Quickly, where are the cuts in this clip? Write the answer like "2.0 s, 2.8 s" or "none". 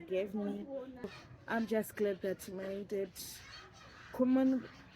1.1 s